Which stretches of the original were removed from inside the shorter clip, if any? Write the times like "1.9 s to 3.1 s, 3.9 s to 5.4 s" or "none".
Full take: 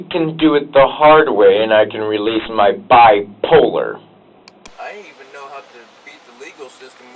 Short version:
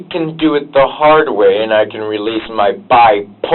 none